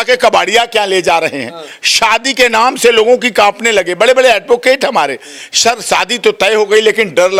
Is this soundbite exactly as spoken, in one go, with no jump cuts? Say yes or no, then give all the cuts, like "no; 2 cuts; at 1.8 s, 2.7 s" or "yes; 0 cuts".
yes; 0 cuts